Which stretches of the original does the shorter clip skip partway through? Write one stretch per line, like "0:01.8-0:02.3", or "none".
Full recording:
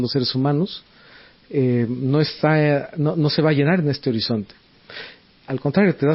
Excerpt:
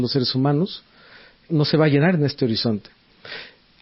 0:01.5-0:03.1